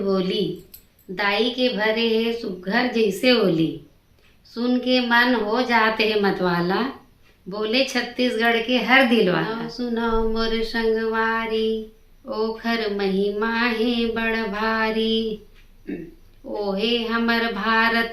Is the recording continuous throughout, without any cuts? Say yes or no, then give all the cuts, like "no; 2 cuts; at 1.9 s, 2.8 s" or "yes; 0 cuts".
no; 1 cut; at 9.6 s